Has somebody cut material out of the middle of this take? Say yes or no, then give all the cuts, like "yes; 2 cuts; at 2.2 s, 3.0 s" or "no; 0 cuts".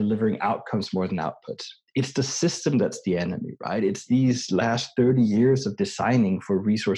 no; 0 cuts